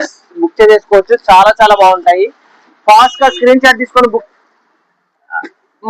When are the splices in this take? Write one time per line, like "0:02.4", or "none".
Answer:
0:04.2